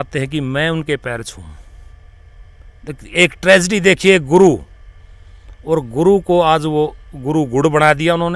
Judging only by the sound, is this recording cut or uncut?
uncut